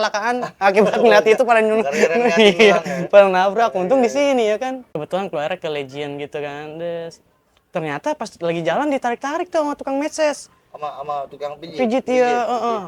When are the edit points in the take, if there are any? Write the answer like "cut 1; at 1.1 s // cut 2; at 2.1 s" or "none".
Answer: cut 1; at 4.8 s

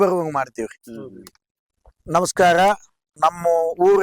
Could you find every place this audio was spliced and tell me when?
cut 1; at 1.9 s // cut 2; at 3.1 s

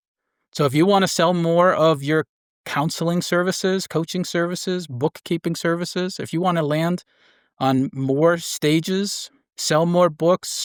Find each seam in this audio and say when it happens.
none

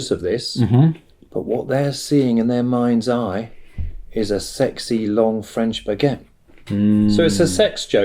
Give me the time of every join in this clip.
none

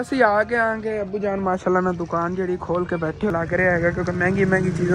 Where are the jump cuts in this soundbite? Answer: cut 1; at 3.3 s

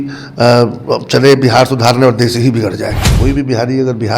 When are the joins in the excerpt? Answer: cut 1; at 3.0 s

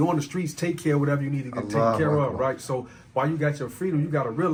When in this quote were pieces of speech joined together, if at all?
none

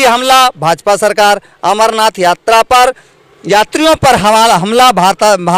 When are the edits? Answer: none

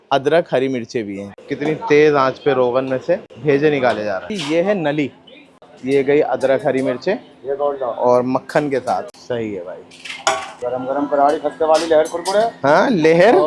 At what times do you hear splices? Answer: cut 1; at 1.2 s // cut 2; at 4.3 s // cut 3; at 5.7 s // cut 4; at 10.5 s

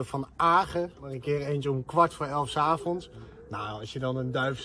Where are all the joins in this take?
cut 1; at 1.1 s

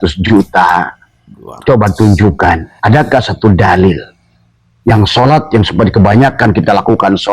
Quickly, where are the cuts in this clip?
cut 1; at 2.7 s

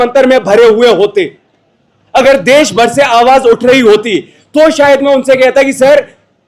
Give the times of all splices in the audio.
none

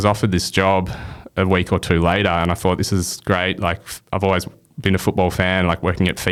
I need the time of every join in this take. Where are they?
none

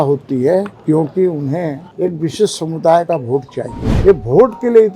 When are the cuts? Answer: cut 1; at 1.8 s // cut 2; at 3.8 s

